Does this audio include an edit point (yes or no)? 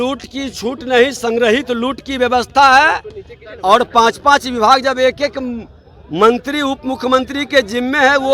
no